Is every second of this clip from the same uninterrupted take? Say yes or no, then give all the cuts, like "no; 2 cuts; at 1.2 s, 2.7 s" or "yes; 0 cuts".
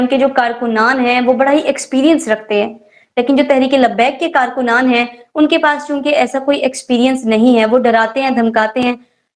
yes; 0 cuts